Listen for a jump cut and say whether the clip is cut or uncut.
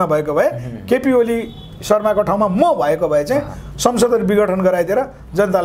uncut